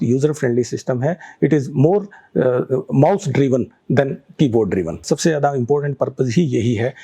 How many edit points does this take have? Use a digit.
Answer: 1